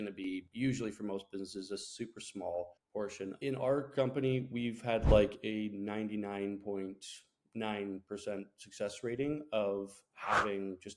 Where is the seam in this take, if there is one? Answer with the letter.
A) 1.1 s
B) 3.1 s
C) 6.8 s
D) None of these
B